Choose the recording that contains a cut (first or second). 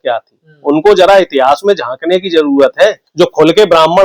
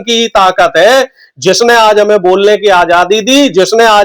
first